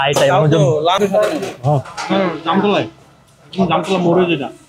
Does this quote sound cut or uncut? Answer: cut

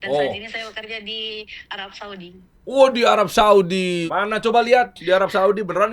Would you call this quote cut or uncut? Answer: cut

